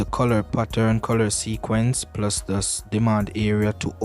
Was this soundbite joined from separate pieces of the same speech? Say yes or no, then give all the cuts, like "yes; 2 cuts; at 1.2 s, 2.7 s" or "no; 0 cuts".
no; 0 cuts